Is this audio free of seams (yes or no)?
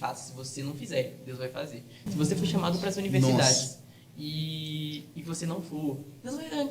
yes